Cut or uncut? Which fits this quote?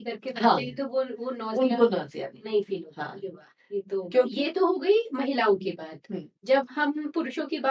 cut